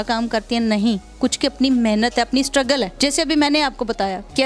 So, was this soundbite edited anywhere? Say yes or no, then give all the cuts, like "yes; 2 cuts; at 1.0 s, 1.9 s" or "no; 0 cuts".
no; 0 cuts